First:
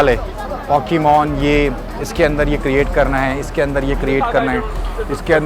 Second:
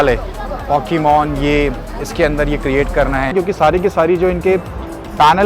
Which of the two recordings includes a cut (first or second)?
second